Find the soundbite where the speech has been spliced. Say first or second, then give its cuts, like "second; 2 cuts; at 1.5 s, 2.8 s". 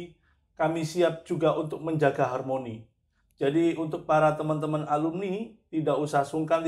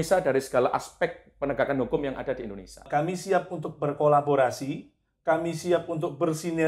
second; 1 cut; at 2.9 s